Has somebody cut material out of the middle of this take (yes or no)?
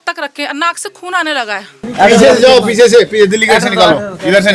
yes